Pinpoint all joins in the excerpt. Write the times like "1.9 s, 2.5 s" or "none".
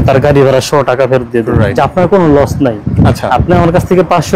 1.7 s